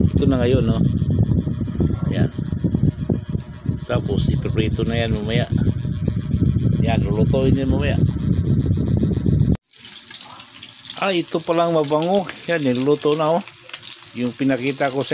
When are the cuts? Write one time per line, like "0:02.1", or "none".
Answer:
0:09.6